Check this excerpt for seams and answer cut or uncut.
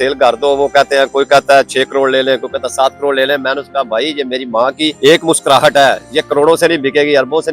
cut